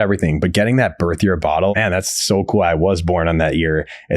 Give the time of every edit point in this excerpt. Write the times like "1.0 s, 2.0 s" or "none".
1.7 s